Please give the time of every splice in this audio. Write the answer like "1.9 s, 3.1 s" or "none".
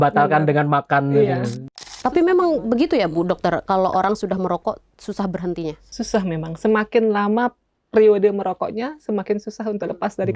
1.6 s